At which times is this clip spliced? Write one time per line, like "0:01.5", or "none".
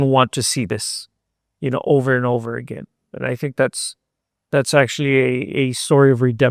none

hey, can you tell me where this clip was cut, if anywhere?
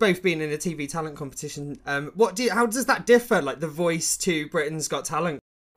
none

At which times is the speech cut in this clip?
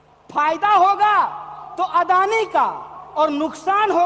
none

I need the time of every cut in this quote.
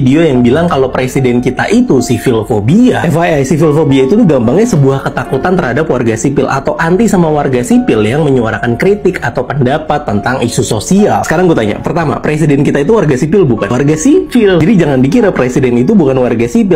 none

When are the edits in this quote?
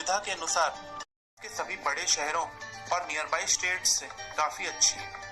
0:01.4

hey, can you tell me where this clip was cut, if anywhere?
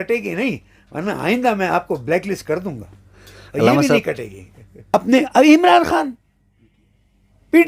0:04.9

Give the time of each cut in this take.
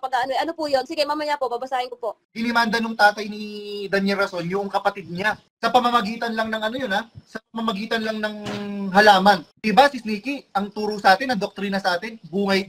0:02.3
0:05.5
0:09.5

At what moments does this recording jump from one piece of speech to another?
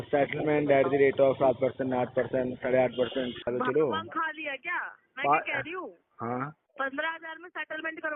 0:03.5
0:06.6

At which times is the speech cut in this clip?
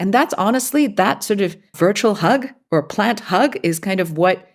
0:01.7

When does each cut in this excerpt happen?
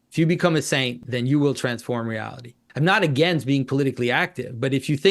0:01.0
0:02.6

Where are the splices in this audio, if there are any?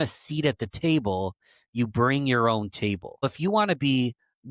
0:03.2

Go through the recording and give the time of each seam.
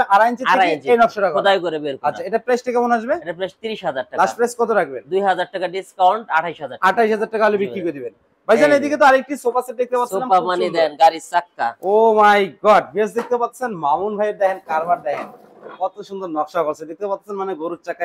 none

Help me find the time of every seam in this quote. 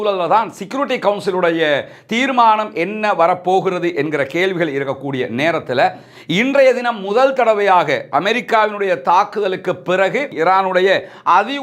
none

